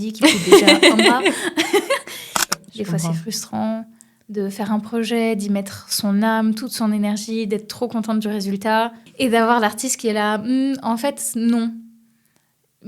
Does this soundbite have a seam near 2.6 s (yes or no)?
yes